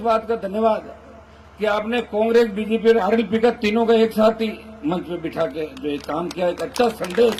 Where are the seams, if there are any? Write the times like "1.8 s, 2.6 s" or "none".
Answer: none